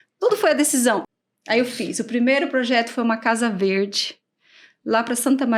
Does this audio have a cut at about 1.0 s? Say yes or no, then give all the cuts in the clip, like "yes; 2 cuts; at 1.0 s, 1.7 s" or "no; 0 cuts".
yes; 1 cut; at 1.0 s